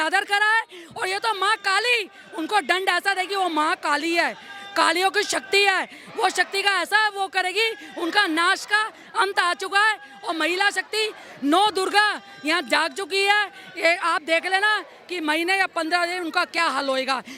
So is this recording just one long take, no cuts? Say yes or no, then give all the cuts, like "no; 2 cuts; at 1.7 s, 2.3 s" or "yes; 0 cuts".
yes; 0 cuts